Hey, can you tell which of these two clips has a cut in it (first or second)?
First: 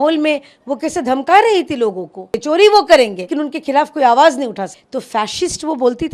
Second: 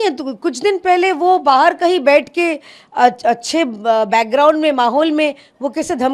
first